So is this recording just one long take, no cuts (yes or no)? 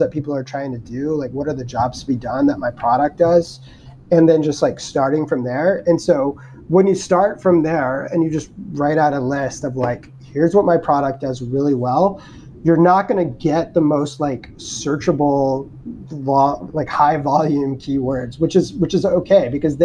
yes